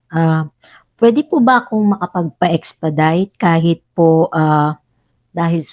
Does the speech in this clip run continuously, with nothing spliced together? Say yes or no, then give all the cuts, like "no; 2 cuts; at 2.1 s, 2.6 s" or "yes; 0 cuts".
yes; 0 cuts